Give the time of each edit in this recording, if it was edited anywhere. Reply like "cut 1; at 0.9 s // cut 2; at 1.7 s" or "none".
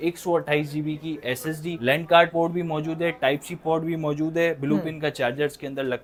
none